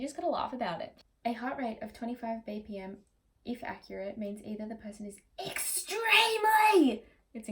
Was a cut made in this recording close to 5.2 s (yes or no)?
no